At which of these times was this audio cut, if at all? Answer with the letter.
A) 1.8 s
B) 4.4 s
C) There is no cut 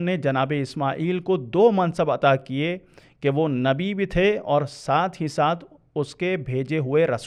C